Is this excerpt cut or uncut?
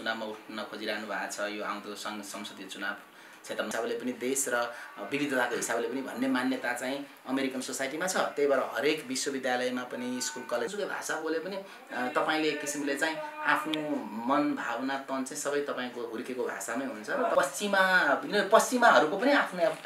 cut